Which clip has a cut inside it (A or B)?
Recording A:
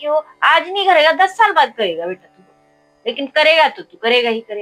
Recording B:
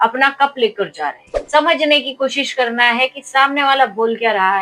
B